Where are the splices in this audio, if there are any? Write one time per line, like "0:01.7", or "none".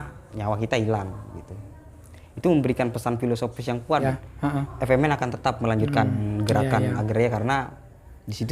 0:04.0

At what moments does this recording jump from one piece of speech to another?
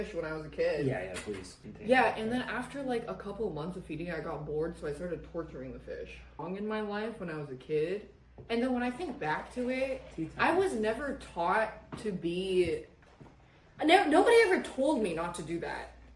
0:01.5
0:06.4

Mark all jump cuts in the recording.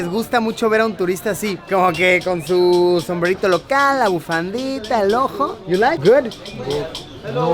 0:06.0

